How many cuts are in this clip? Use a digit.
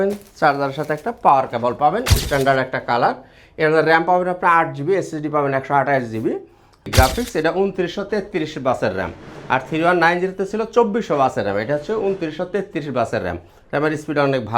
2